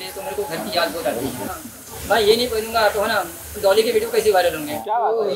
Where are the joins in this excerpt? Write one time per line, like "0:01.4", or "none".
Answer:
0:01.4